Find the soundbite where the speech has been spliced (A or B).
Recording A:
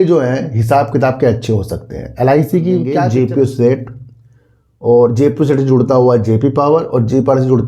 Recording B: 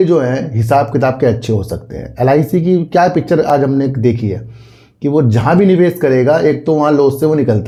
A